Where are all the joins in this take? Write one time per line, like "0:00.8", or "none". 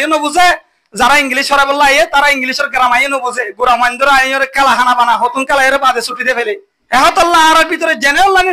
0:06.7